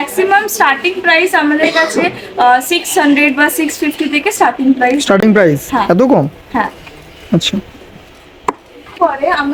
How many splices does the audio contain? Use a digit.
0